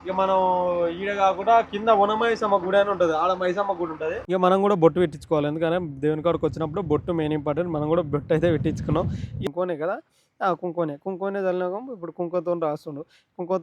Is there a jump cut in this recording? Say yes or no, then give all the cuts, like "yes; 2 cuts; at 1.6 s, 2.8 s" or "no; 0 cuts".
yes; 2 cuts; at 4.2 s, 9.2 s